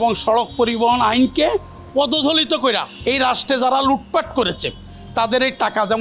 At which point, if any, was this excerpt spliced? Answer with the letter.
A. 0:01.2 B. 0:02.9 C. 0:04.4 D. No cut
B